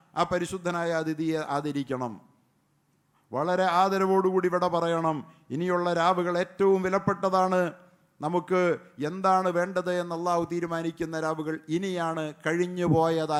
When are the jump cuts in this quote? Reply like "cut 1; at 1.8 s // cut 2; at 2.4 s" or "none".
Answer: none

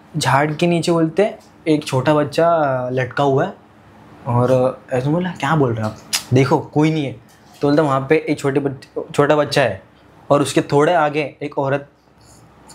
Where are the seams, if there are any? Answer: none

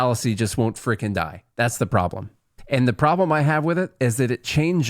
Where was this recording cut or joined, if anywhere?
cut 1; at 2.5 s

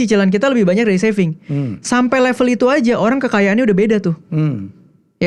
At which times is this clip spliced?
none

